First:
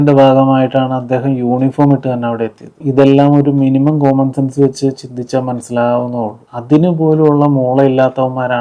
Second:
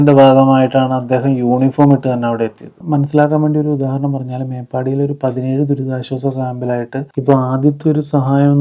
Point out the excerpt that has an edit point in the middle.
second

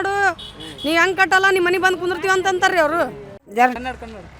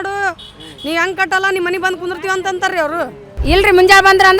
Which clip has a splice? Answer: second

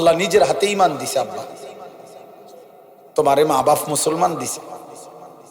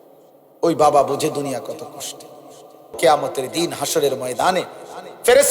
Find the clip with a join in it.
second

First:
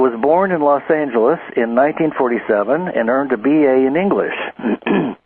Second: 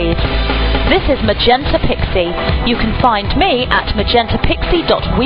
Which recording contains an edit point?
second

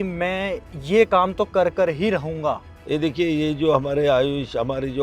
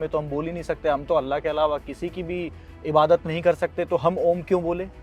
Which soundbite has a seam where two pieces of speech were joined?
first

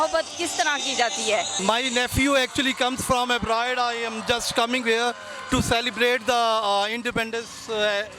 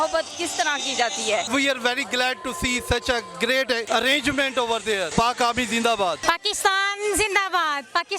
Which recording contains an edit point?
second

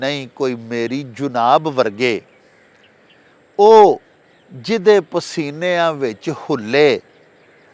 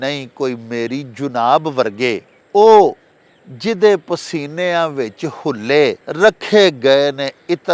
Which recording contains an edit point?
second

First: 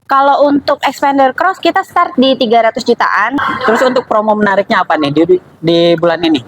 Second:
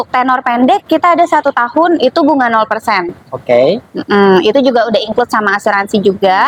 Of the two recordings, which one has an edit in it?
first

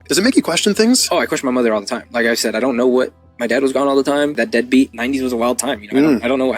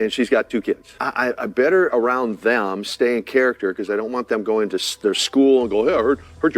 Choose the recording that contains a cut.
first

